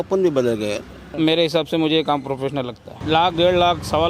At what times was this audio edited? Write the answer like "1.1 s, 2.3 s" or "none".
1.1 s, 2.9 s